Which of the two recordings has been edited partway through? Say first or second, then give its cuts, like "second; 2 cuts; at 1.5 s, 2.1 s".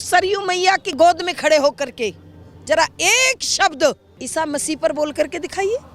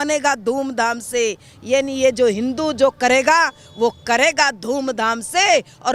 first; 2 cuts; at 0.9 s, 4.1 s